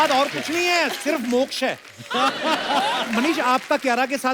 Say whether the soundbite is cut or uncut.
cut